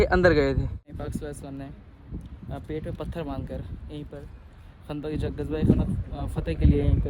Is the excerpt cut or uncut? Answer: cut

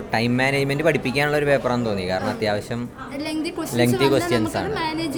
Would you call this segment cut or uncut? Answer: uncut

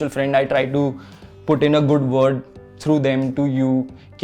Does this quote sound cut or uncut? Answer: uncut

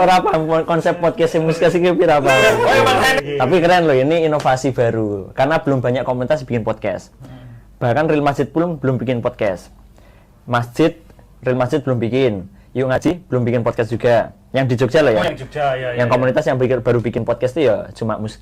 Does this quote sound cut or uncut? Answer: cut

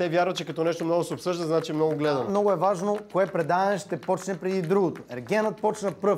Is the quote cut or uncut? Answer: cut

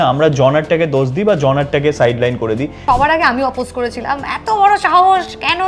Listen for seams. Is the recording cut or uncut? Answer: cut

